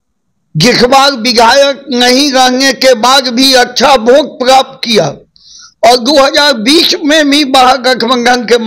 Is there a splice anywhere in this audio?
no; 0 cuts

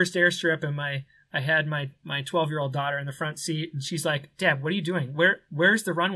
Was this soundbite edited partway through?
no; 0 cuts

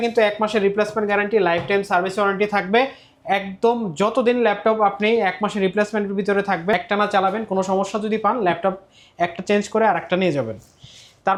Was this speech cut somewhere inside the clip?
no; 0 cuts

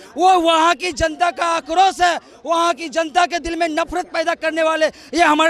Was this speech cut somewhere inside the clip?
no; 0 cuts

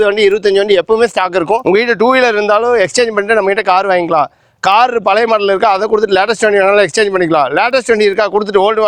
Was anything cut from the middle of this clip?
yes; 1 cut; at 1.6 s

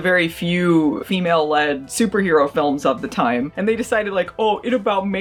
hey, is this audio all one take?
yes; 0 cuts

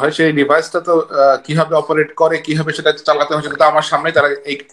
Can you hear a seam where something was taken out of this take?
no; 0 cuts

